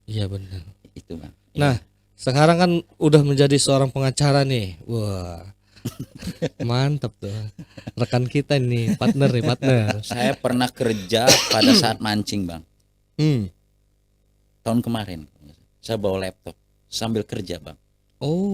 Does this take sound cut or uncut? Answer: cut